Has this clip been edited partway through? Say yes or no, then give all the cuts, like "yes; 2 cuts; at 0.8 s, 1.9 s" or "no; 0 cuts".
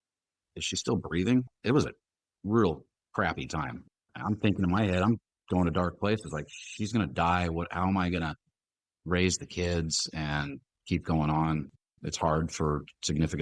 yes; 3 cuts; at 1.5 s, 3.8 s, 11.8 s